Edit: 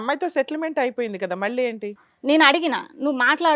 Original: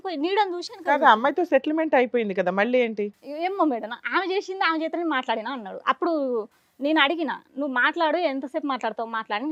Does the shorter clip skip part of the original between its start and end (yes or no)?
yes